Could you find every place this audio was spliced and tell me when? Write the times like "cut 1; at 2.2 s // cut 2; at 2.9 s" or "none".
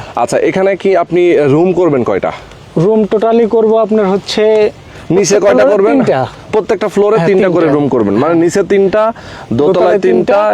none